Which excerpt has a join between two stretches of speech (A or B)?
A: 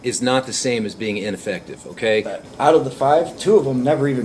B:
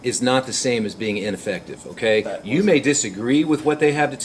A